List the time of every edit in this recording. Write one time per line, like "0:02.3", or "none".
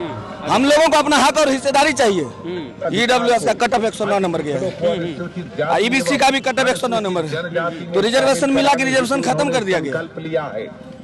0:02.8